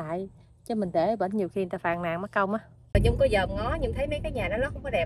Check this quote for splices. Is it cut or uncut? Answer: cut